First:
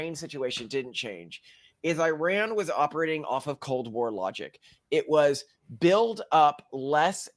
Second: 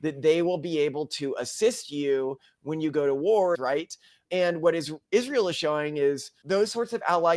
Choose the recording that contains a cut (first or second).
second